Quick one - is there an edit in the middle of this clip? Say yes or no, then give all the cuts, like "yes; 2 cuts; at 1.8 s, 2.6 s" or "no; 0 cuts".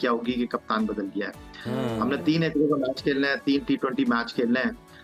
no; 0 cuts